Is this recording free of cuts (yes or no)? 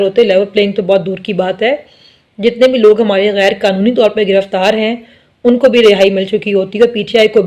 yes